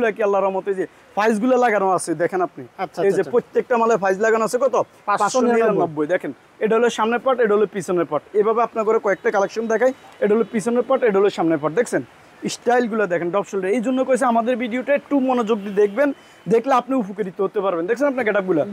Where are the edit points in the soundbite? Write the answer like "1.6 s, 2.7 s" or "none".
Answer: none